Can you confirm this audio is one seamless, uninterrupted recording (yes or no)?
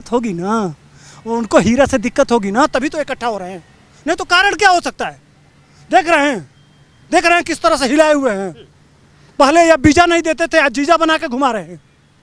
yes